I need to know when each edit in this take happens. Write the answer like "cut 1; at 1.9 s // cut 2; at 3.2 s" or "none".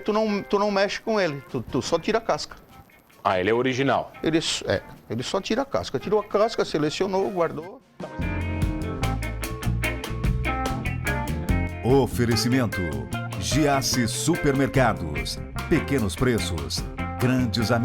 cut 1; at 7.8 s